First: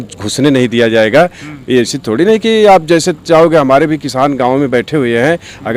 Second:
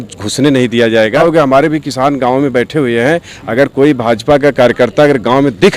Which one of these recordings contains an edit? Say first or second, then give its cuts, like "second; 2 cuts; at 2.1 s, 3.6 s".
second; 1 cut; at 1.2 s